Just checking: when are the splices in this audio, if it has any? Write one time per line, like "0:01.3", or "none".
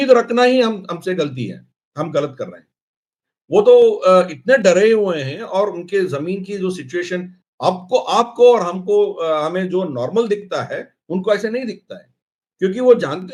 none